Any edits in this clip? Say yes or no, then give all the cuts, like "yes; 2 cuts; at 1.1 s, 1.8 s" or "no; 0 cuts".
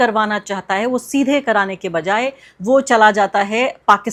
no; 0 cuts